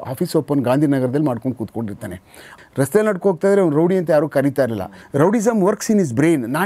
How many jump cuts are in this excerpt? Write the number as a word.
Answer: one